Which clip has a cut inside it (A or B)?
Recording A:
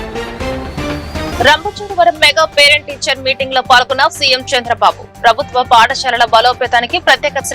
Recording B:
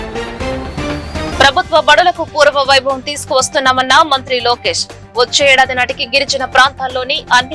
B